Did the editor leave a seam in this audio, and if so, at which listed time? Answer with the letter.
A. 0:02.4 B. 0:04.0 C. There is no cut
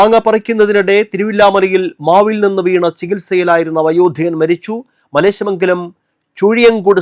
C